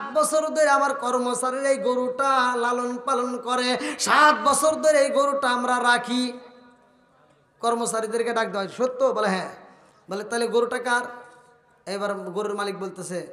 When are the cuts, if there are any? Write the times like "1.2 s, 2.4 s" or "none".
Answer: none